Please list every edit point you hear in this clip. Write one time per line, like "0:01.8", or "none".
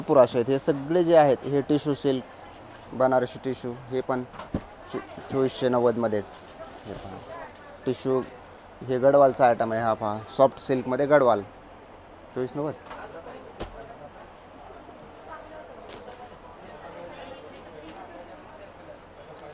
none

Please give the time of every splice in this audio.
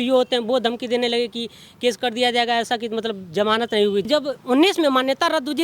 0:04.1

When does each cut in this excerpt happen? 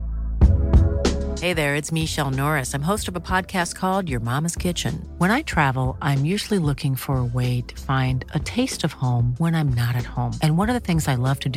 none

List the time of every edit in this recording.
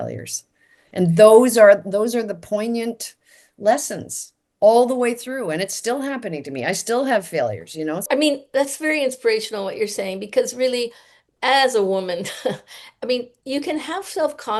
none

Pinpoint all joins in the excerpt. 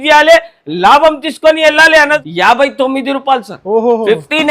0:02.2

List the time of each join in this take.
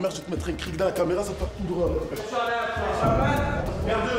none

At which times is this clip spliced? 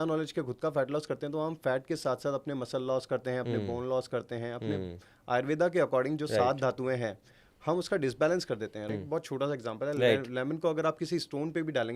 0:08.9

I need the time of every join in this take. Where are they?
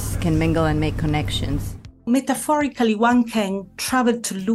0:01.9

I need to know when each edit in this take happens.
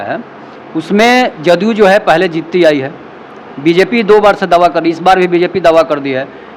none

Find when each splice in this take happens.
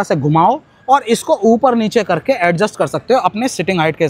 none

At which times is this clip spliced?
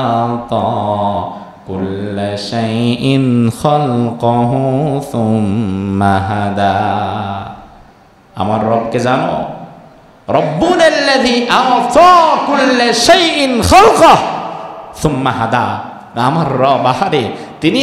none

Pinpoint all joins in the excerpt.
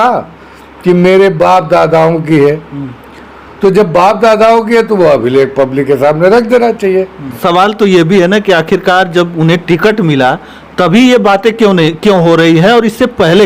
0:07.4

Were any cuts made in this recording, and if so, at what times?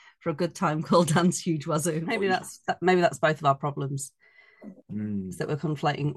0:02.1

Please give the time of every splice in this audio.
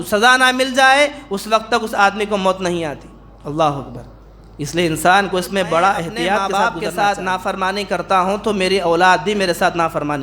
0:06.5

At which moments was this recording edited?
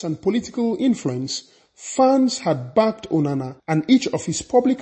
0:03.5

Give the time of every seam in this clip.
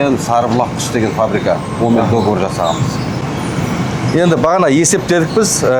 none

